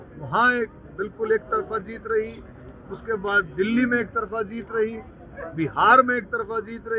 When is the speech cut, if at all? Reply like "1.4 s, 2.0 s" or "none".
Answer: none

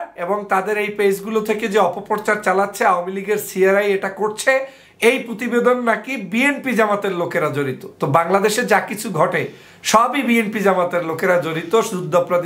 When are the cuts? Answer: none

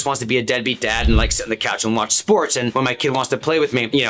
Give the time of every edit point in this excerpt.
none

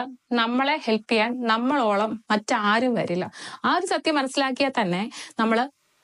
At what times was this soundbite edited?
none

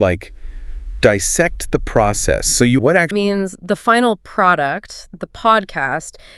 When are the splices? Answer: 2.8 s

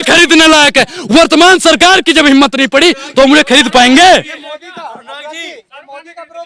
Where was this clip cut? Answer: none

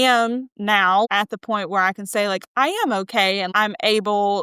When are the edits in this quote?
1.1 s, 3.5 s

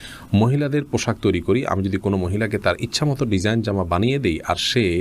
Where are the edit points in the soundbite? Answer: none

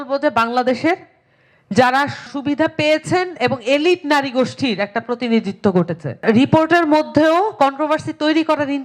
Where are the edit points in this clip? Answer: 6.2 s

